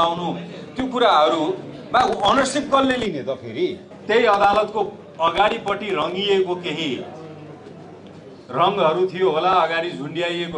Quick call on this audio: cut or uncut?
cut